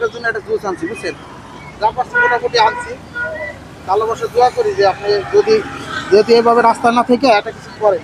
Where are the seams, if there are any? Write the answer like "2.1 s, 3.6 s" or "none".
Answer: none